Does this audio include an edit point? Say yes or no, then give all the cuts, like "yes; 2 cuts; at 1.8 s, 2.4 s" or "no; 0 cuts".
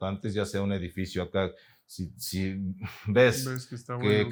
no; 0 cuts